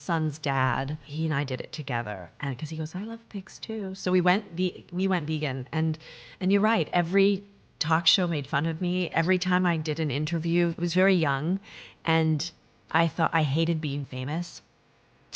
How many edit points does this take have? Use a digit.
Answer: 2